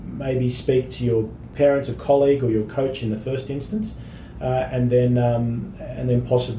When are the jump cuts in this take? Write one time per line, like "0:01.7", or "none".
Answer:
0:01.4

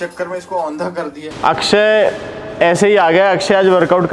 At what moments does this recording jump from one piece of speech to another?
0:01.3

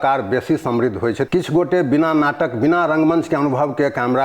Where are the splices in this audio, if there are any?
0:01.3

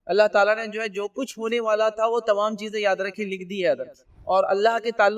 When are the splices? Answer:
0:04.1

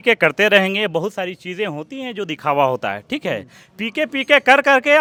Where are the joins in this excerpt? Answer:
none

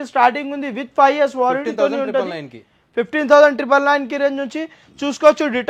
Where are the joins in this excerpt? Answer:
none

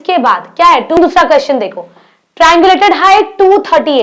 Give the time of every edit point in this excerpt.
0:01.0

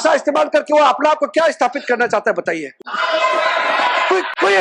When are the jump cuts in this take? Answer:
none

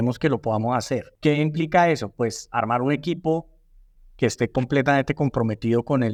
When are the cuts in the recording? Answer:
none

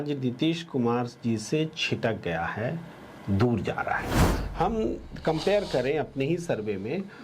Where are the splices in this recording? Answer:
0:04.4

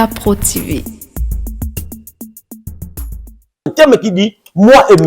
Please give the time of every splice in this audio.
0:03.7

